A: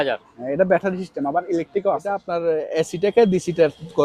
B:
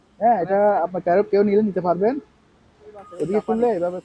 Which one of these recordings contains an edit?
A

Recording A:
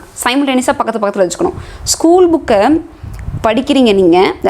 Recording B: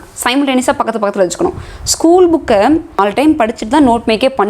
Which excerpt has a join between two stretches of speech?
B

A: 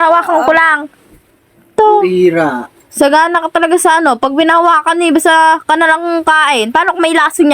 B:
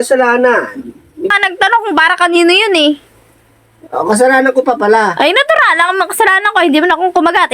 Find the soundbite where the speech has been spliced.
B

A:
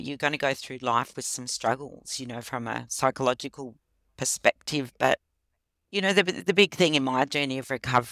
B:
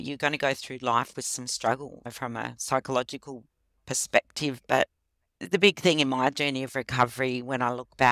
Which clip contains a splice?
B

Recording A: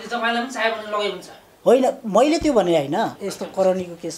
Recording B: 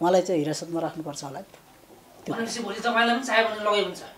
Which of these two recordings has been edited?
A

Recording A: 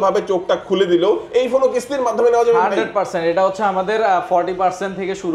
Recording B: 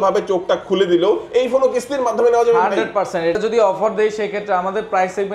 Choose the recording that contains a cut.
B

